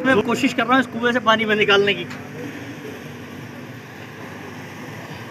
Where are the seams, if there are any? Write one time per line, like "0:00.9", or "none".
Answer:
none

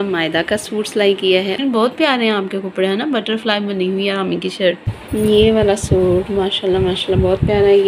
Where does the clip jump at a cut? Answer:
0:01.6
0:04.9

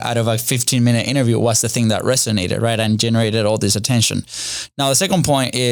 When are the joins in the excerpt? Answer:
none

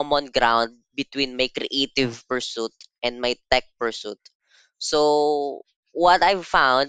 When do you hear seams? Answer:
none

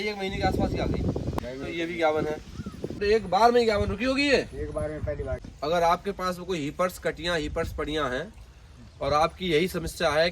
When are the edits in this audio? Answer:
0:01.3
0:03.0
0:05.3

